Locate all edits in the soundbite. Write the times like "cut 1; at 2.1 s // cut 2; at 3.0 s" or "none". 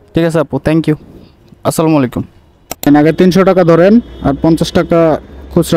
cut 1; at 2.9 s